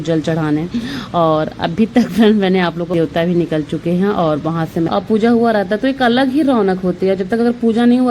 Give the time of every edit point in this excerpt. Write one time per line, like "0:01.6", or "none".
0:02.9
0:04.9